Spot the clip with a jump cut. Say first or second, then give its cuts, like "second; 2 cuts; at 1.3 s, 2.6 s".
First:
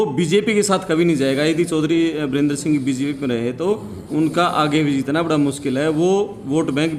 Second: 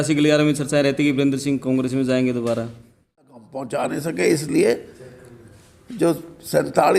second; 1 cut; at 3.6 s